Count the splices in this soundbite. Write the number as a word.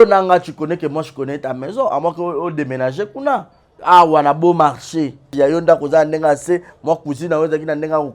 two